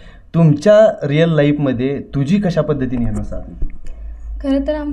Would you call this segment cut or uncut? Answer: uncut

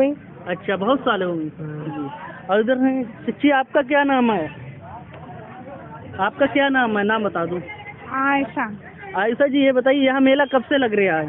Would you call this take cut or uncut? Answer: uncut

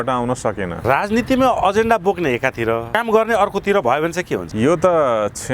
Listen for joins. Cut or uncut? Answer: cut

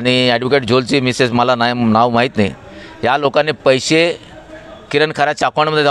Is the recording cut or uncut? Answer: uncut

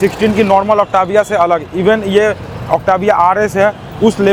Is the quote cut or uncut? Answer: uncut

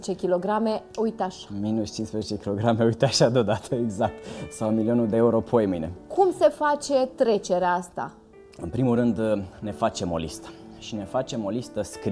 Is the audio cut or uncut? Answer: uncut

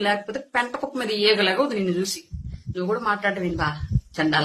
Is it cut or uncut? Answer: uncut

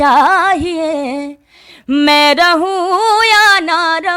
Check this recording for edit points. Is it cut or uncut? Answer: uncut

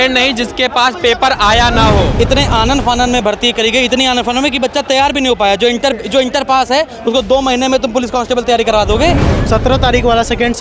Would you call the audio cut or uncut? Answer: cut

